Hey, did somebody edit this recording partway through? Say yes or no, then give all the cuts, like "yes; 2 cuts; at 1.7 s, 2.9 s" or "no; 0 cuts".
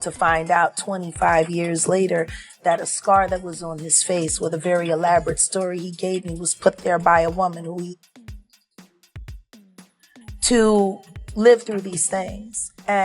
yes; 2 cuts; at 8.6 s, 10.4 s